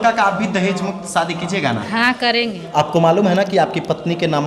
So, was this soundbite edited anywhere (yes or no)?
yes